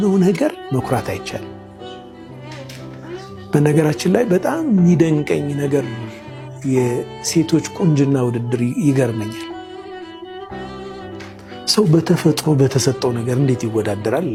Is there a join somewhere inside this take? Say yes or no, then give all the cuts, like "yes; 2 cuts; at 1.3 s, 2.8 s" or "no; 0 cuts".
no; 0 cuts